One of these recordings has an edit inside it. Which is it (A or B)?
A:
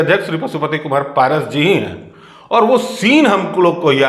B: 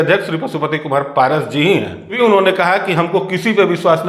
B